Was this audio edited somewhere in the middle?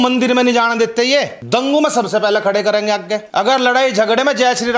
yes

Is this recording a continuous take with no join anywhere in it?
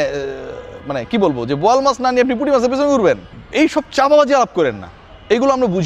no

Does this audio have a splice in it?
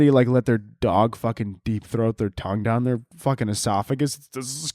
no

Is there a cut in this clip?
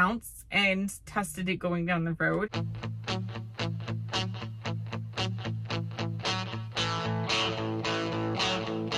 yes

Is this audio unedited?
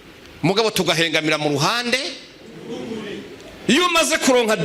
no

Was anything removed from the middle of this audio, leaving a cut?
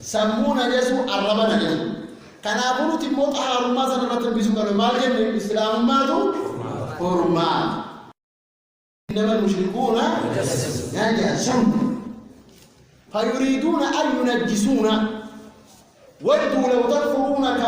yes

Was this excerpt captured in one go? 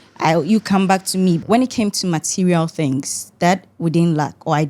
no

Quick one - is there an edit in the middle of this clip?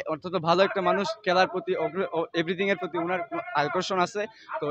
no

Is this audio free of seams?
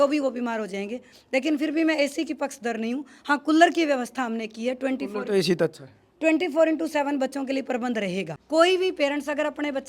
no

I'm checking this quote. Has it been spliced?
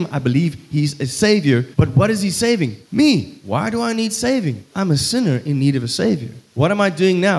yes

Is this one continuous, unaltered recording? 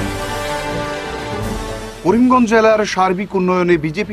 yes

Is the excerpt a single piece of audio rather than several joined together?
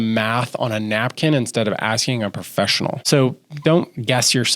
no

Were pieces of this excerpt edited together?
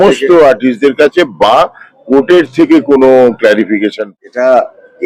yes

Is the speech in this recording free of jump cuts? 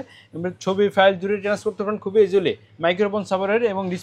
yes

